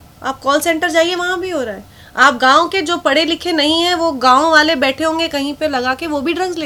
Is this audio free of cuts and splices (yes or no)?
yes